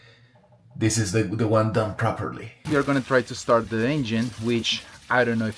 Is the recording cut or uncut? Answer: cut